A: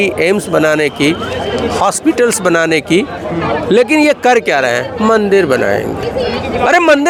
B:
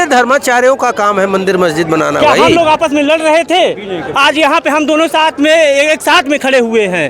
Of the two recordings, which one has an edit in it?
B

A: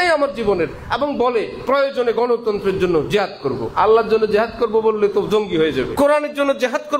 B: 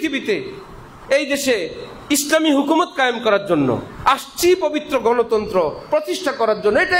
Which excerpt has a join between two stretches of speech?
A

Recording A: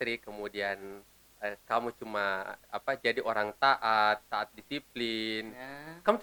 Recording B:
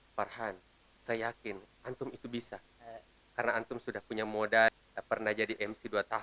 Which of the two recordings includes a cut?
B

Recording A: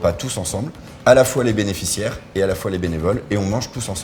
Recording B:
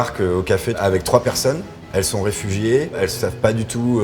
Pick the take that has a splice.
B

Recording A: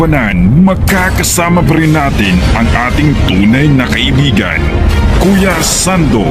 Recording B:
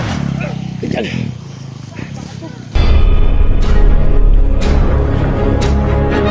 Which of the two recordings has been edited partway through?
B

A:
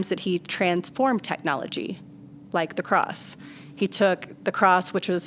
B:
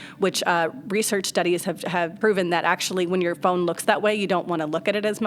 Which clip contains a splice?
B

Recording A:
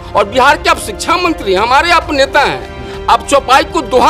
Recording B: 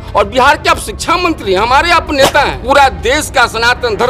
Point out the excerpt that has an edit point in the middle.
B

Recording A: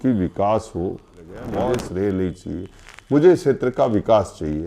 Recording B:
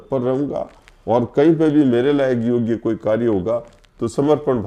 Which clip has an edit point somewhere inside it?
A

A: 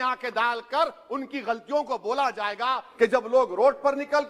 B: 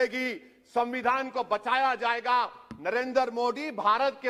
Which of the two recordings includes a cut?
A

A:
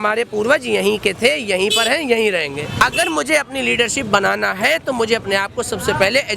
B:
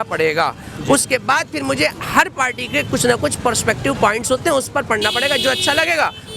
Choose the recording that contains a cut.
A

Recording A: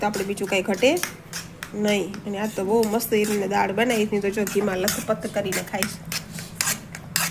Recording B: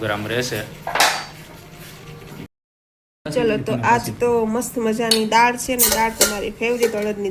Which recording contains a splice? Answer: B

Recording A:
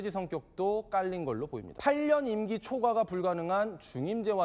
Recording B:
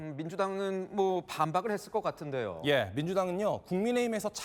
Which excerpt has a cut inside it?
A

